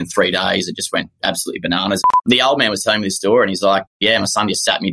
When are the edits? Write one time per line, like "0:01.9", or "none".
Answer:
0:02.0
0:04.0